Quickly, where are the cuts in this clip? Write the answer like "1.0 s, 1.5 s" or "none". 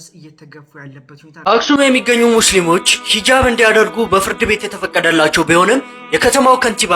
1.4 s